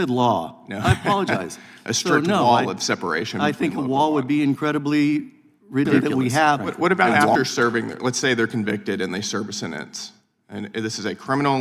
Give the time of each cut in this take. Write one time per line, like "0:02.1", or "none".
0:05.9